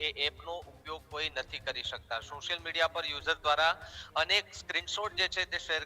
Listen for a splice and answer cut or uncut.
uncut